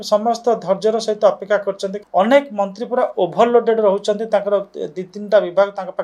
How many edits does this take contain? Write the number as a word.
one